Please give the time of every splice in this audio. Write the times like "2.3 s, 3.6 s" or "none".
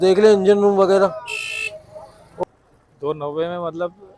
2.4 s